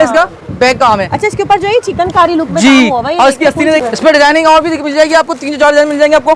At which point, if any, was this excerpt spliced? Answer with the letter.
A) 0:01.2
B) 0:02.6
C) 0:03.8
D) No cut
C